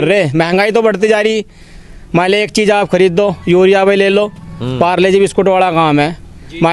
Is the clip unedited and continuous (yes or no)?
yes